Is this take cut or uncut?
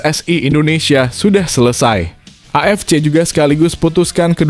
uncut